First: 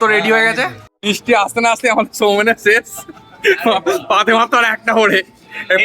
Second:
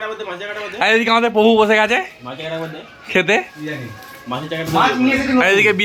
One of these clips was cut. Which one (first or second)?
first